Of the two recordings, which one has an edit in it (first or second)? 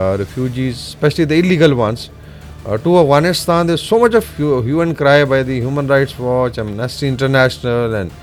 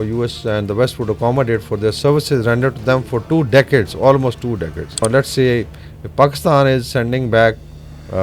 second